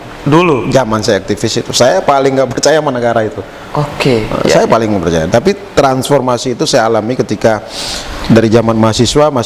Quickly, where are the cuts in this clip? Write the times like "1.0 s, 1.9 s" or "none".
none